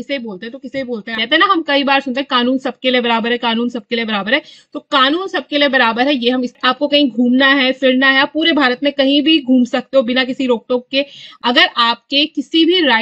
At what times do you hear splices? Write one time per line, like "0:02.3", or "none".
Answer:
0:01.2
0:06.6
0:11.2